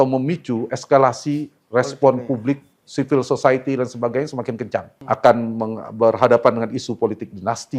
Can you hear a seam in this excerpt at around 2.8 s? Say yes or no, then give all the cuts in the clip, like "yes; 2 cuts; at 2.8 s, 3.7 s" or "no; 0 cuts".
no; 1 cut; at 4.9 s